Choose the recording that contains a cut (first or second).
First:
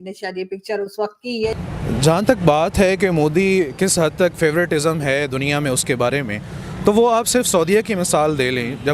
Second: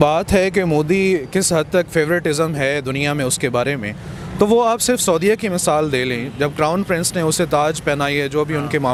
first